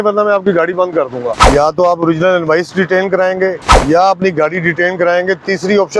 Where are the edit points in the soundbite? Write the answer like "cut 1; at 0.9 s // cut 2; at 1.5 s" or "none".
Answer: cut 1; at 1.4 s // cut 2; at 3.7 s